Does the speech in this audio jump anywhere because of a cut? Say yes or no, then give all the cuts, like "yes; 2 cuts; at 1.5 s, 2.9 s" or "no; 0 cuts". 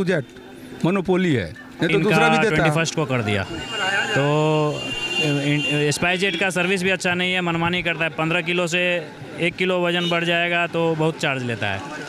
yes; 1 cut; at 2.6 s